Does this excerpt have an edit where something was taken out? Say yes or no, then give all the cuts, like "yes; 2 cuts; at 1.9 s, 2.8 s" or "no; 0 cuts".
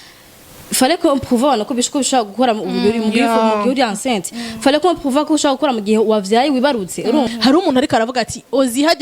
yes; 1 cut; at 7.3 s